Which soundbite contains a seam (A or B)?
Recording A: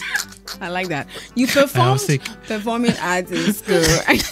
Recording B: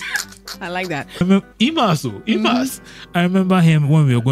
B